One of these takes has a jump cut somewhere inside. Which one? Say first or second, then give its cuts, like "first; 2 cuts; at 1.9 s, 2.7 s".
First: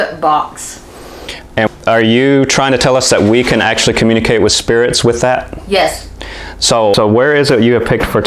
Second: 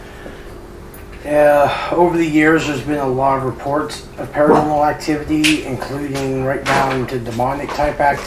first; 2 cuts; at 1.7 s, 6.9 s